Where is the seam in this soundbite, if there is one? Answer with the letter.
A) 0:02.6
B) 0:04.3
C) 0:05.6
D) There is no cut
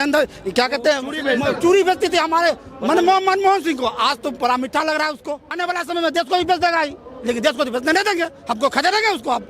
C